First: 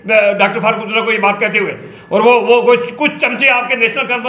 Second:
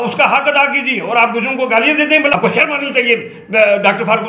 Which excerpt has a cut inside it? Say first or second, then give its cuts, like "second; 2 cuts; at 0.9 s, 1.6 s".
second; 1 cut; at 2.3 s